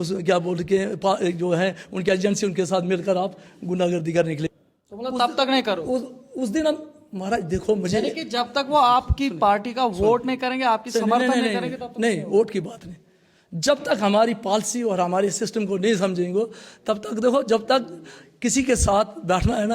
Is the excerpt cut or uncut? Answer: cut